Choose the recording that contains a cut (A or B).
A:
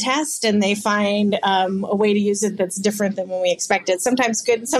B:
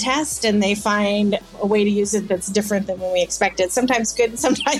B